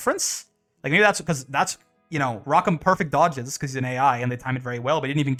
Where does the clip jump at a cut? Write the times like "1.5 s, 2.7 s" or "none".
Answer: none

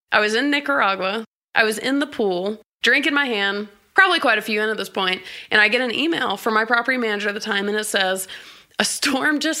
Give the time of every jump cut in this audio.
1.3 s, 2.7 s, 3.8 s

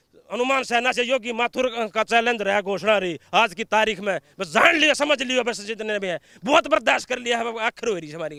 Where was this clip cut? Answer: none

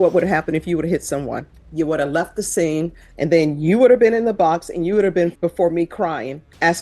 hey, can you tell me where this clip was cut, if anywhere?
1.6 s, 3.0 s, 5.3 s

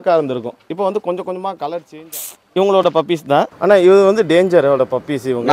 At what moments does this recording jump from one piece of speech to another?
1.8 s, 3.5 s

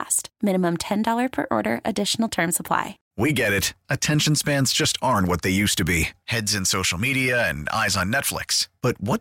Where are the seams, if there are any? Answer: 3.0 s

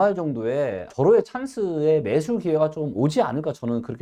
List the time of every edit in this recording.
none

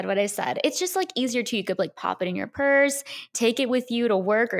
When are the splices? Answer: none

